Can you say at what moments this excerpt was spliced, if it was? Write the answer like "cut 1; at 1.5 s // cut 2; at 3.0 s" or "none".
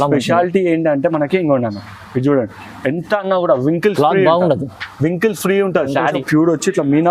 cut 1; at 6.2 s